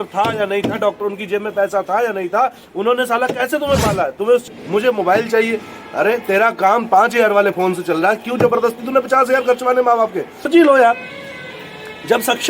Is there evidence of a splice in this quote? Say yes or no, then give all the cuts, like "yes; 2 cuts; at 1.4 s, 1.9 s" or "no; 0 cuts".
yes; 2 cuts; at 4.6 s, 10.5 s